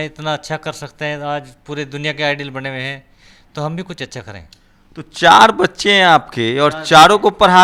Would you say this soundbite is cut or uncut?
uncut